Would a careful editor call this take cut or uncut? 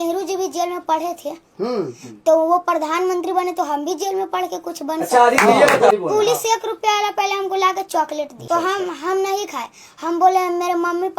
cut